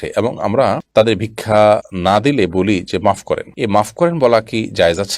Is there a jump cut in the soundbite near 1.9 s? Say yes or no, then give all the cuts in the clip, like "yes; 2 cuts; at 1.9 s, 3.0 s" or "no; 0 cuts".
yes; 1 cut; at 1.9 s